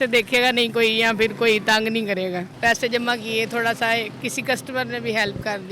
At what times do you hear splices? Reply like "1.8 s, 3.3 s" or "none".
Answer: 2.5 s, 4.1 s